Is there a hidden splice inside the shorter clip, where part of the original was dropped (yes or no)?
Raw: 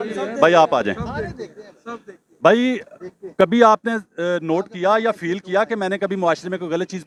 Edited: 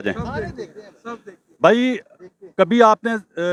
no